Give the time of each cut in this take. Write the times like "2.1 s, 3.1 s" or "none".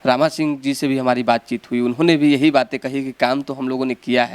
none

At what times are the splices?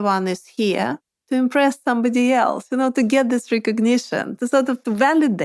1.1 s

